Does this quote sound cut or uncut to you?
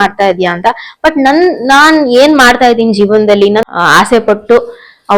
cut